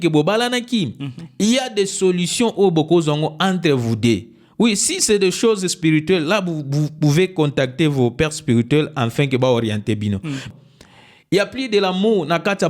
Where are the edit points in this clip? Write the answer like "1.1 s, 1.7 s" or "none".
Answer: 10.5 s